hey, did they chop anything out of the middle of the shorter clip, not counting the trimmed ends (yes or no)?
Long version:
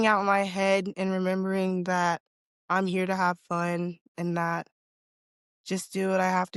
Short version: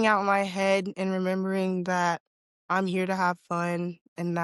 no